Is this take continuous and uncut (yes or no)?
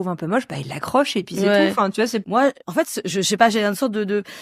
no